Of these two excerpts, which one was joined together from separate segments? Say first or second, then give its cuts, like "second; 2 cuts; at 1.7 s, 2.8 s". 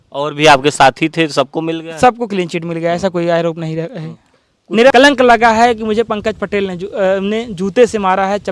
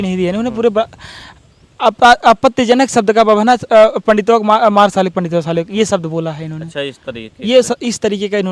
first; 1 cut; at 4.9 s